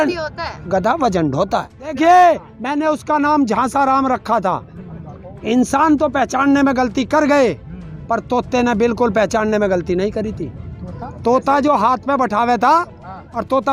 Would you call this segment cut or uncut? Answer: cut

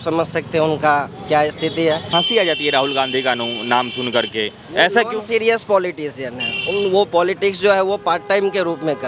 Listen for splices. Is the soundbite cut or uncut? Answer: cut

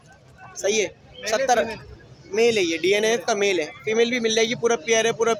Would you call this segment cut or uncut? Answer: uncut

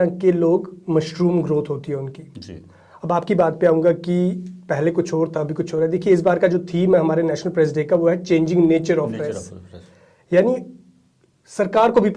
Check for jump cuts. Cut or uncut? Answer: uncut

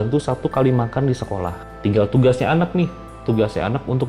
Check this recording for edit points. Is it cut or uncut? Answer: cut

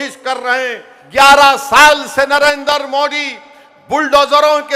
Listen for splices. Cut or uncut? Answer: cut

